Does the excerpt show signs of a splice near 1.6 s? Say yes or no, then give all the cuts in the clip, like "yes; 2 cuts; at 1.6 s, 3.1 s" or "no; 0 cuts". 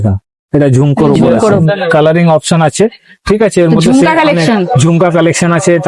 yes; 1 cut; at 1.6 s